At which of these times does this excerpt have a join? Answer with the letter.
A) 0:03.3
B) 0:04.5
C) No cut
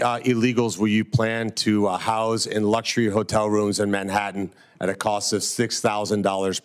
C